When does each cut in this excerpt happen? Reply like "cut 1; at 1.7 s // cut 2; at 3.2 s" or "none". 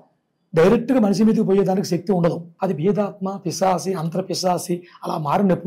cut 1; at 2.5 s